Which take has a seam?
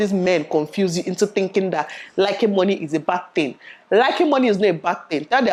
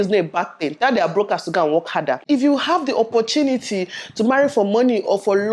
second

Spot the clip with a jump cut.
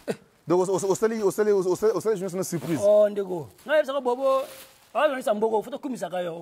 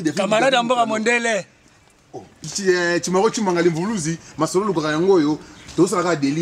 second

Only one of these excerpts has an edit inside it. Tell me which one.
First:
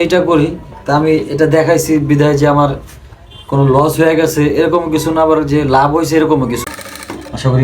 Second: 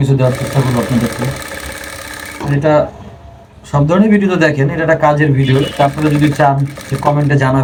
first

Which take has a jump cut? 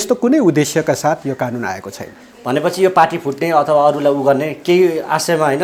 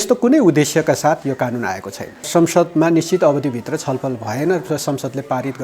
second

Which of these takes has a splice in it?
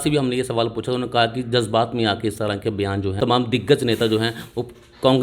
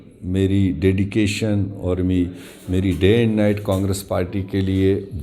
first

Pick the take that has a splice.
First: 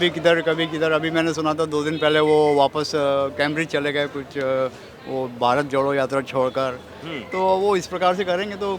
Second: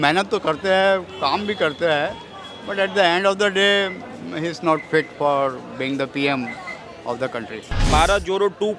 second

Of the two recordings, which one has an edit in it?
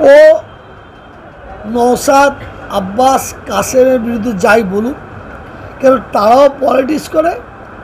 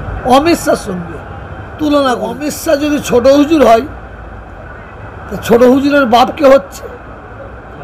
second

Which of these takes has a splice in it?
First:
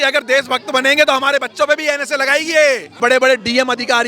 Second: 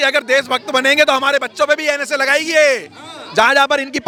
first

